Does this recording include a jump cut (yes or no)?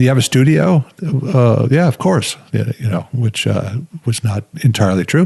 no